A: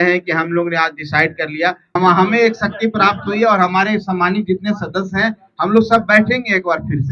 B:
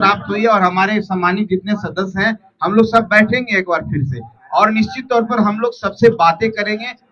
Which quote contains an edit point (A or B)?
A